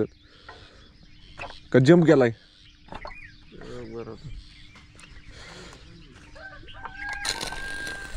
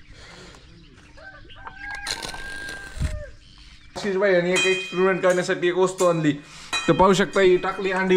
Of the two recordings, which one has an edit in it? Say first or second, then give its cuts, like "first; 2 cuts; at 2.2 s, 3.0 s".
second; 1 cut; at 4.0 s